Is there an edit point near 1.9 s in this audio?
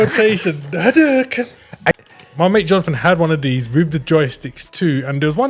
yes; 1 cut; at 1.9 s

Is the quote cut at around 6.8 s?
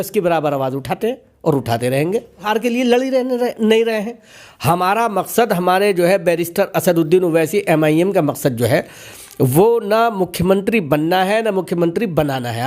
no; 1 cut; at 2.4 s

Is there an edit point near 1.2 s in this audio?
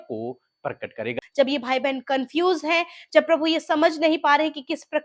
yes; 1 cut; at 1.2 s

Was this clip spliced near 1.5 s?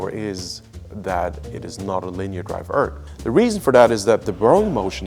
no; 1 cut; at 3.1 s

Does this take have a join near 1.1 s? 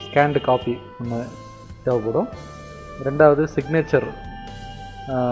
no; 1 cut; at 3.7 s

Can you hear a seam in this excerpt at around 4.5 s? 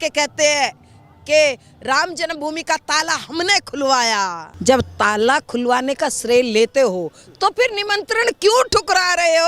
yes; 1 cut; at 4.5 s

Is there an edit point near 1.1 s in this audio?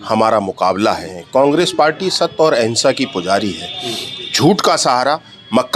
yes; 1 cut; at 1.1 s

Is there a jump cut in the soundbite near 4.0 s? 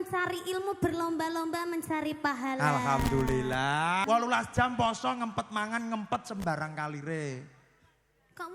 yes; 1 cut; at 4.0 s

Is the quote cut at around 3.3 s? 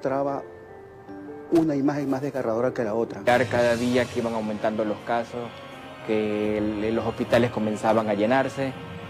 yes; 1 cut; at 3.3 s

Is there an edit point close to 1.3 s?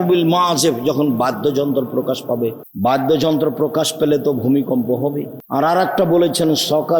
no; 2 cuts; at 2.7 s, 5.3 s

